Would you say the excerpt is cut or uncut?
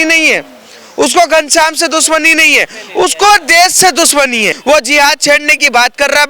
cut